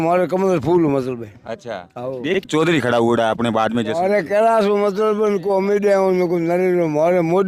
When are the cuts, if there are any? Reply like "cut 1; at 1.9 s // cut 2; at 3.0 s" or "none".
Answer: cut 1; at 2.5 s